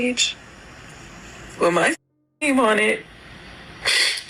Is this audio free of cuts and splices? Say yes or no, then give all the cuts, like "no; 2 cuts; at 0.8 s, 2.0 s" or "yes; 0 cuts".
yes; 0 cuts